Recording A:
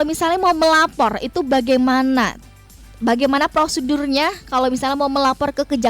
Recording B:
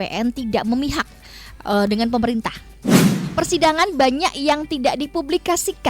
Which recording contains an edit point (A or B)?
B